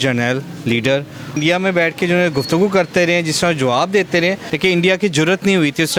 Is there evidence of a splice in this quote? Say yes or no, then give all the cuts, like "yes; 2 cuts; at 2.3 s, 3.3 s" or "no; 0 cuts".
no; 0 cuts